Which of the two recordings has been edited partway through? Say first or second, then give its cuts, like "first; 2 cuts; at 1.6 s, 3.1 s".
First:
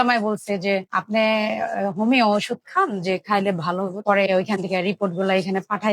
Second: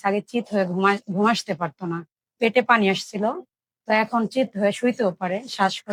first; 1 cut; at 4.0 s